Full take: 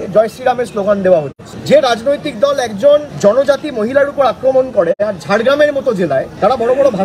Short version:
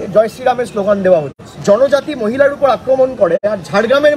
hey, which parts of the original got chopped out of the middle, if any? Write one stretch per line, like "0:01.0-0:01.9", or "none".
0:01.6-0:03.1